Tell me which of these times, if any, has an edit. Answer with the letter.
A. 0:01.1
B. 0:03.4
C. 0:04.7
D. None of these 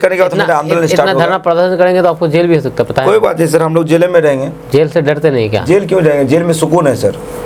D